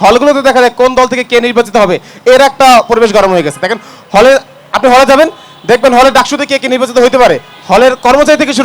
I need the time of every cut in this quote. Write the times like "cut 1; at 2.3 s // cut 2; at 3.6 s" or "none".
none